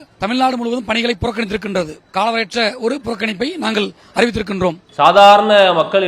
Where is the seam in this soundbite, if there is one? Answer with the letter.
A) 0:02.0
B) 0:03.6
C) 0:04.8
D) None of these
C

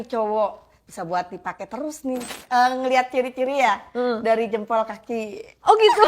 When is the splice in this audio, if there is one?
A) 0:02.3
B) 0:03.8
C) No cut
A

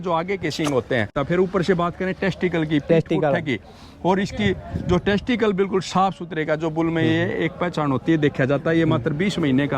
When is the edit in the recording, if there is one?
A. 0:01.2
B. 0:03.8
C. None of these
A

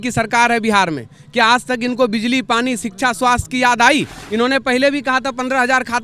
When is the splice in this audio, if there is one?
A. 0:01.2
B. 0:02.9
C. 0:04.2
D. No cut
C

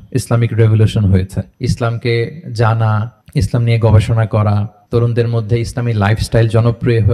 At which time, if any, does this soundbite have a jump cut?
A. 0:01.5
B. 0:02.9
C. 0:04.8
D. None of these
A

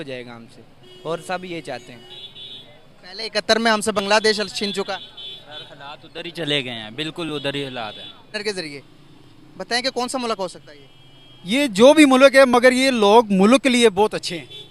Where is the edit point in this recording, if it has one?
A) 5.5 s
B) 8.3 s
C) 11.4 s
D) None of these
B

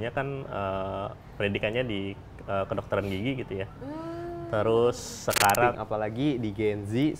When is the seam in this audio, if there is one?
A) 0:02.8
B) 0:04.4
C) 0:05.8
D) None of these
C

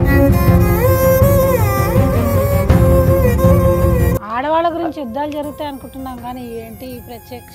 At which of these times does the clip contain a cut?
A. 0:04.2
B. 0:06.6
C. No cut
A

